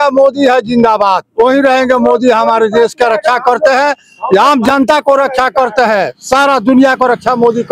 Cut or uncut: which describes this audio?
uncut